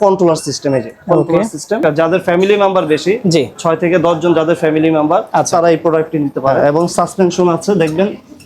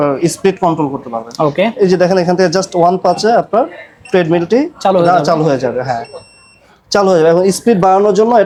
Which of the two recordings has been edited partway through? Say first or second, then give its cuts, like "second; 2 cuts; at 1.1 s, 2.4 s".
first; 2 cuts; at 1.8 s, 6.5 s